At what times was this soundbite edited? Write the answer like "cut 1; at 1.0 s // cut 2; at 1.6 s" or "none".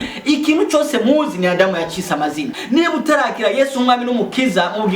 cut 1; at 2.5 s